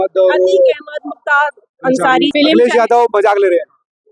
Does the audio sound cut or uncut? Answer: cut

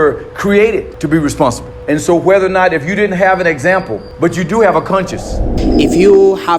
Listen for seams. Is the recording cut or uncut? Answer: cut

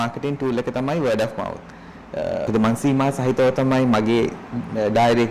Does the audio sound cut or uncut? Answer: cut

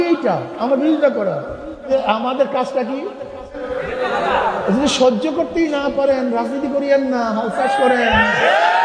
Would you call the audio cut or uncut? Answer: cut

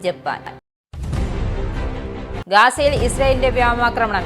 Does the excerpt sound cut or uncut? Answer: uncut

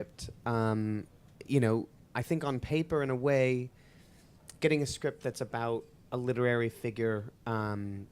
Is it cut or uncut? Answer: cut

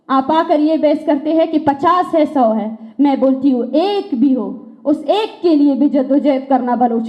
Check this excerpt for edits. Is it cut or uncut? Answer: uncut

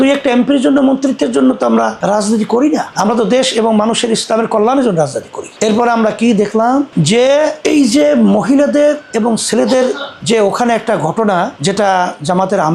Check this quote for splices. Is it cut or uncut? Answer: uncut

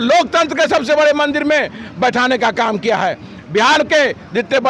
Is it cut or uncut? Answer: uncut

